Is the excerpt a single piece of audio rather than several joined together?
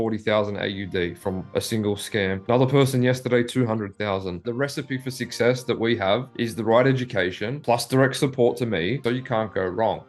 no; 2 cuts; at 4.4 s, 9.0 s

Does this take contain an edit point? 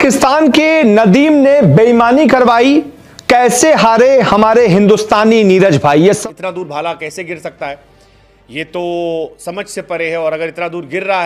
yes; 1 cut; at 6.2 s

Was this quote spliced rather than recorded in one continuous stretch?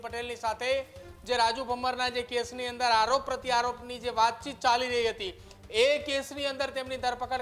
no; 0 cuts

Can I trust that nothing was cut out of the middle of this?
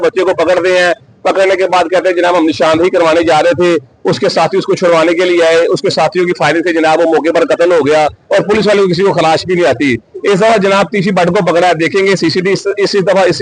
yes; 0 cuts

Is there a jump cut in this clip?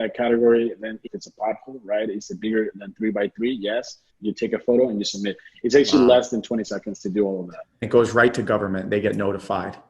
yes; 3 cuts; at 1.1 s, 4.1 s, 7.9 s

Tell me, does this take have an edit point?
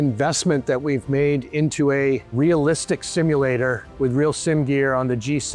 no; 0 cuts

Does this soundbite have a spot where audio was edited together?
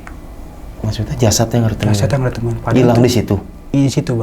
no; 0 cuts

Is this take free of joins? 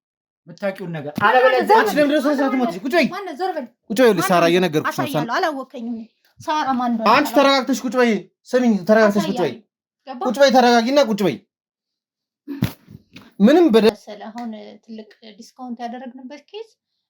no; 1 cut; at 13.9 s

